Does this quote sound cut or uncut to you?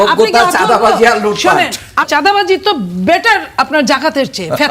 cut